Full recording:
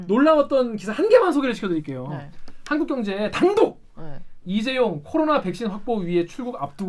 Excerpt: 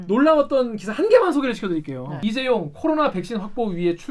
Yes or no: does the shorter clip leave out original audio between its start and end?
yes